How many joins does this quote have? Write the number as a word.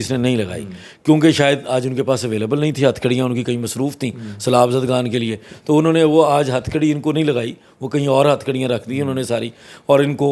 zero